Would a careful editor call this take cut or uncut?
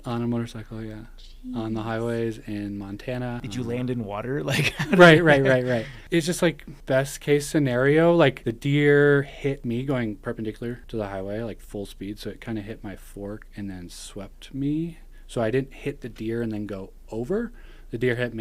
cut